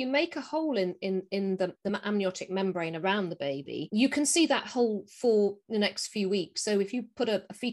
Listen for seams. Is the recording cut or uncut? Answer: uncut